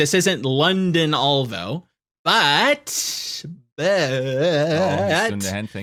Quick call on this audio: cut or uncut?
uncut